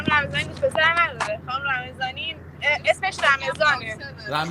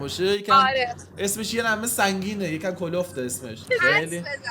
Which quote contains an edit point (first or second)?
second